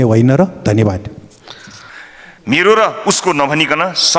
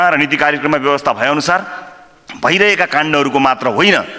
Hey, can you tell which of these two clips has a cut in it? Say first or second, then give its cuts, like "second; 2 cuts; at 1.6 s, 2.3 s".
first; 1 cut; at 1.6 s